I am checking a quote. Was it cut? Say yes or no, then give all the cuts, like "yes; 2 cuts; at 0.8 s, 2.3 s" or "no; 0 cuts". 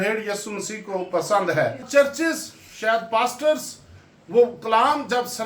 yes; 1 cut; at 1.8 s